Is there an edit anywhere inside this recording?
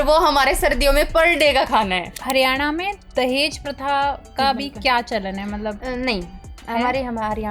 yes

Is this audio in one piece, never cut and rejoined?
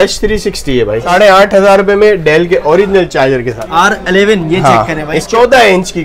no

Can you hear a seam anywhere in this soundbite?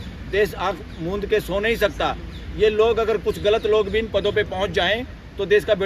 no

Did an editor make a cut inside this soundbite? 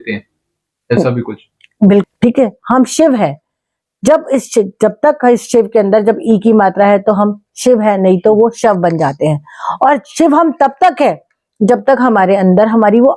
yes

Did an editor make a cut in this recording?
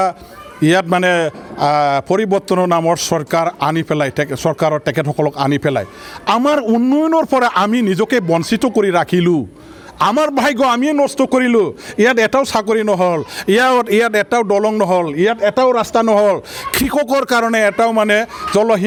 no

